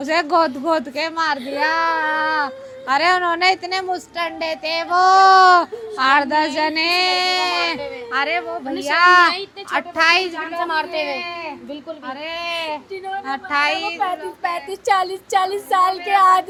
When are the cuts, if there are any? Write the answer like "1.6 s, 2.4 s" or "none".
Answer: none